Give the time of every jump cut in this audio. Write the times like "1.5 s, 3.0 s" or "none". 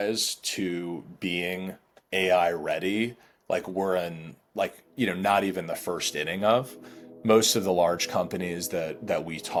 none